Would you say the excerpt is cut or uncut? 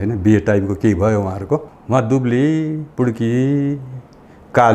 cut